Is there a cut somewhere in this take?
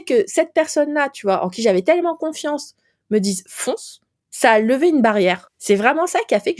yes; 1 cut; at 5.5 s

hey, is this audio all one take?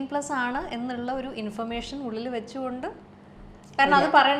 yes; 0 cuts

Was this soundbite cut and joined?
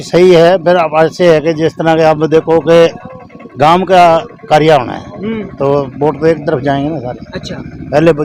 no; 0 cuts

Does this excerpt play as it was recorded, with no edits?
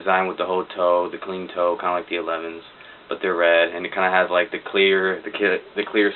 no; 1 cut; at 2.9 s

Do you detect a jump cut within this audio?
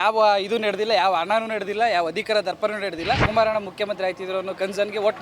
yes; 1 cut; at 3.3 s

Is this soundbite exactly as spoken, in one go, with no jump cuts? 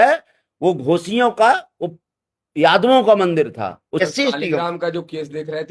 no; 1 cut; at 4.0 s

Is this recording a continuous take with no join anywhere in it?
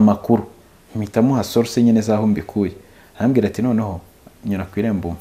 yes; 0 cuts

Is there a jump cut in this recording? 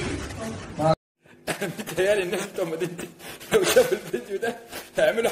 yes; 1 cut; at 0.9 s

